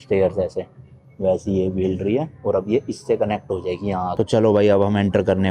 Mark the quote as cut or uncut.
cut